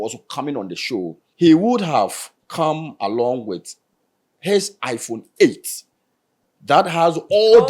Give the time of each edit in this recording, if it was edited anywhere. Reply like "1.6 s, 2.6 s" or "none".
1.2 s